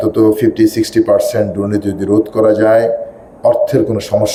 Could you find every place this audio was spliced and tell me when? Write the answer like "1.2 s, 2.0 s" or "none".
none